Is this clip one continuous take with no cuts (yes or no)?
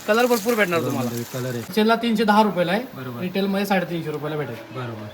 no